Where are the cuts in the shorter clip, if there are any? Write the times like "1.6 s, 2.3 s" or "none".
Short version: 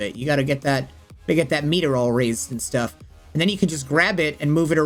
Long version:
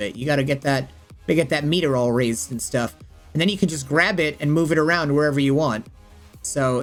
none